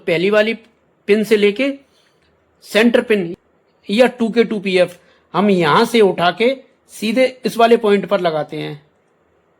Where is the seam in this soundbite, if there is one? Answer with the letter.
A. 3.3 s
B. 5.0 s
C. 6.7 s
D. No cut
A